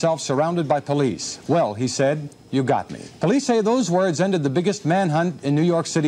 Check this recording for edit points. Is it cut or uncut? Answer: cut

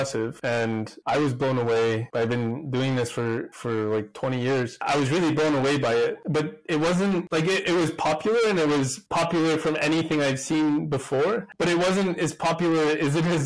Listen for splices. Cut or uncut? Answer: uncut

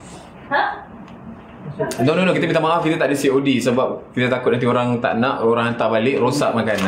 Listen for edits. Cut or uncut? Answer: uncut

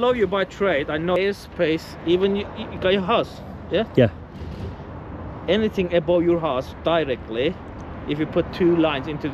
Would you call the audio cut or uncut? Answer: cut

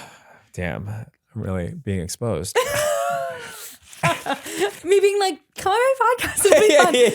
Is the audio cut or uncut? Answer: cut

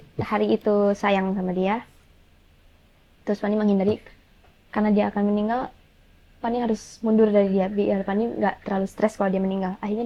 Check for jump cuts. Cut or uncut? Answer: uncut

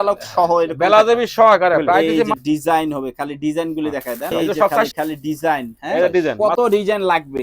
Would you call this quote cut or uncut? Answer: cut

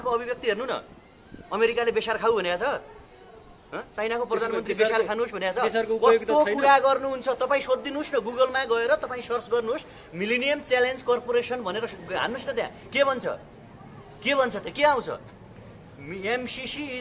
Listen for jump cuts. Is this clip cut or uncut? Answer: uncut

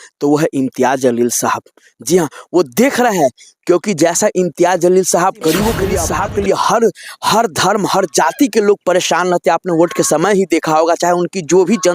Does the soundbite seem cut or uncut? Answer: cut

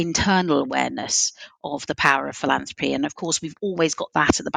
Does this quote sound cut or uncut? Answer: uncut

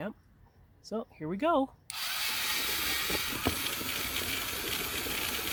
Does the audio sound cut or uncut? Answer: uncut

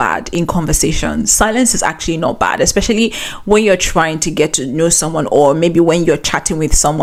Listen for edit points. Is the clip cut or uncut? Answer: uncut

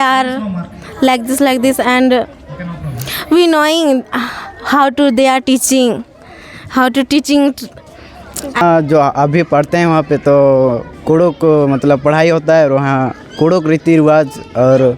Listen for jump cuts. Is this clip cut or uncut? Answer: cut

